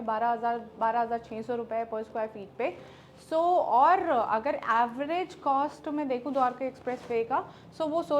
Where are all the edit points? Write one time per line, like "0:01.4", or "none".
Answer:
none